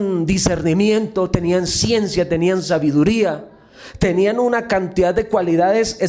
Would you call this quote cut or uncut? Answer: uncut